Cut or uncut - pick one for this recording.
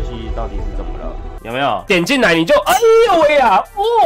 cut